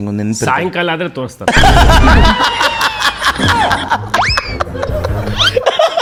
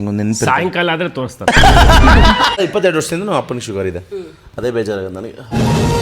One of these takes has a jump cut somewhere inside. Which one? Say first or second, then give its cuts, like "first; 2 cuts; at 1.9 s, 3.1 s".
second; 1 cut; at 2.6 s